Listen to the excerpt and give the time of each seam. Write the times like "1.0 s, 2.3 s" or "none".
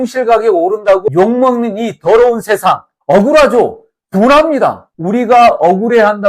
4.9 s

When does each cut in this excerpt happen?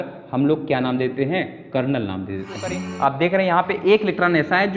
2.8 s

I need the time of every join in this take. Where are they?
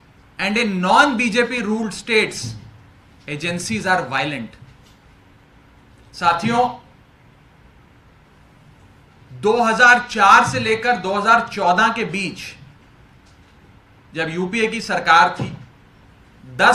none

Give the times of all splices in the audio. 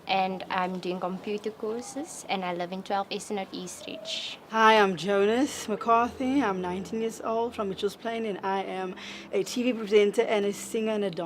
7.5 s

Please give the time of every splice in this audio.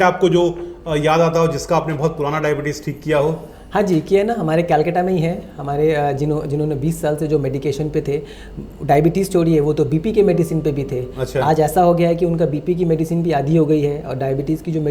none

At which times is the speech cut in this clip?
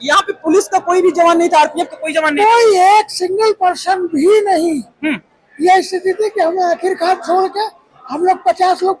none

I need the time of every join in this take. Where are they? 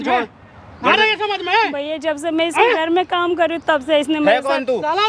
none

